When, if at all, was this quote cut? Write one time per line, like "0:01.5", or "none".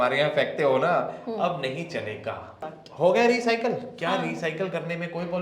0:02.6